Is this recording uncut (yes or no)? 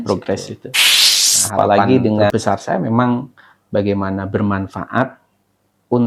no